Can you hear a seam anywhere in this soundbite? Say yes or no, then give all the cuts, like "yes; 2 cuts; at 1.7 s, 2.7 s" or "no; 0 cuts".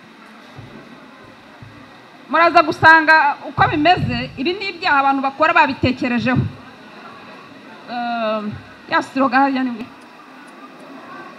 yes; 1 cut; at 9.8 s